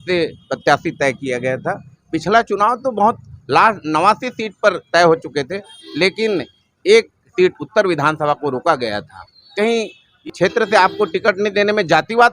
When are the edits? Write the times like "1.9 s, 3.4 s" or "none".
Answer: 10.3 s

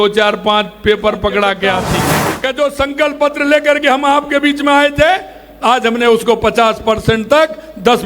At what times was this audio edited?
2.2 s

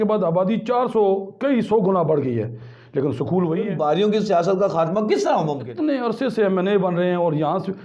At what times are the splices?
3.7 s, 5.6 s

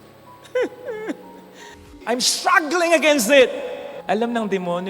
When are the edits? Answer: 1.9 s

